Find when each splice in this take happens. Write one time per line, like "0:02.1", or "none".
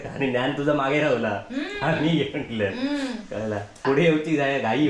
0:03.8